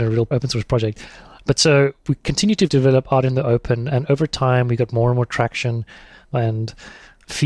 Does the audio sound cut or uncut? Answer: cut